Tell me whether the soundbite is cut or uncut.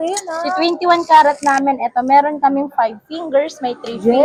uncut